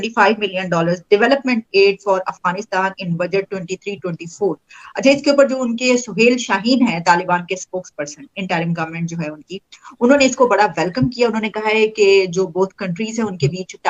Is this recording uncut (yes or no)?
yes